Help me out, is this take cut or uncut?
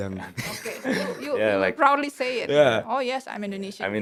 uncut